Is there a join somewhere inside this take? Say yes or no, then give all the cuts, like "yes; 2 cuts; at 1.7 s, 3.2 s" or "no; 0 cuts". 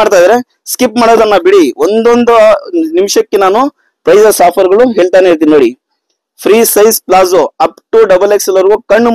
no; 0 cuts